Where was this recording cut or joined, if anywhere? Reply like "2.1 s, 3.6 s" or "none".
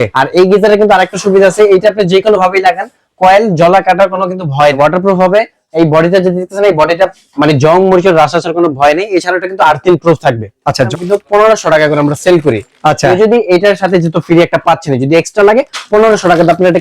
4.8 s, 10.9 s

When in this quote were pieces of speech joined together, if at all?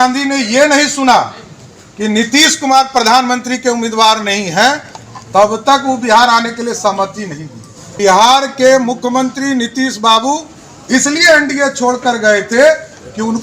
8.0 s

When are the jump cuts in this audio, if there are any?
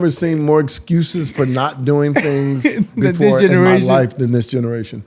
none

